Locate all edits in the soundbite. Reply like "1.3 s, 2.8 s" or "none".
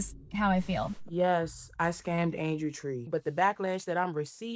1.0 s, 3.0 s